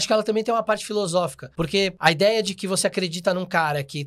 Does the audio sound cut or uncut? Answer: cut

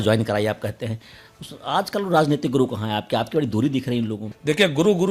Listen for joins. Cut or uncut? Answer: cut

